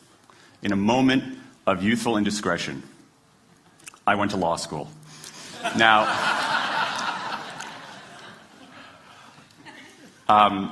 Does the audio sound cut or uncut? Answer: uncut